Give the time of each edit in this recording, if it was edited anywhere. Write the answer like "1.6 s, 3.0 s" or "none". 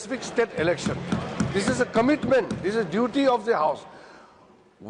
none